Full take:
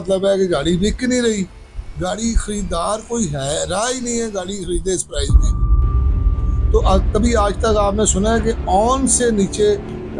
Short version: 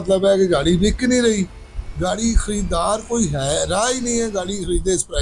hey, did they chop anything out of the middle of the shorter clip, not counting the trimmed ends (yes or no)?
no